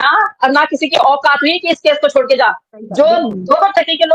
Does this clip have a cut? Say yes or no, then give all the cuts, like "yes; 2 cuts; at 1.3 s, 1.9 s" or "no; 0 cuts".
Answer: no; 0 cuts